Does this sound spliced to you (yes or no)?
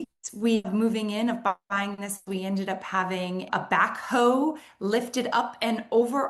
yes